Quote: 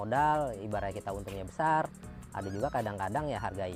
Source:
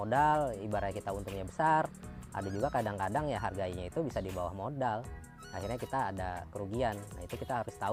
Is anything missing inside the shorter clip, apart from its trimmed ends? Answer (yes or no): no